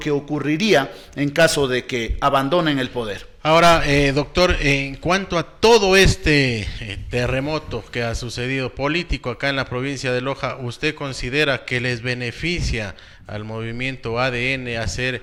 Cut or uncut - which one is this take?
uncut